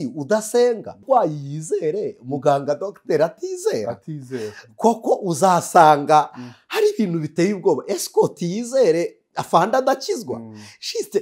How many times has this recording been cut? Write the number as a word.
one